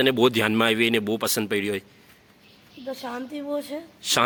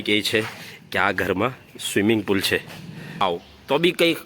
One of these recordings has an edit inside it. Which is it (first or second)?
second